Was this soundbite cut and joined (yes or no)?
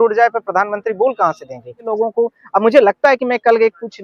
yes